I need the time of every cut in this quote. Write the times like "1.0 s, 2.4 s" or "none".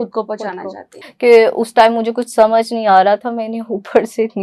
0.9 s